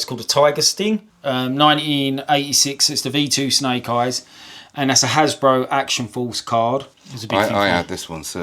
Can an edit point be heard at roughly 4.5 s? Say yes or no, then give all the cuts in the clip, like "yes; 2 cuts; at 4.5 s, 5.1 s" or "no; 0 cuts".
no; 2 cuts; at 1.1 s, 6.9 s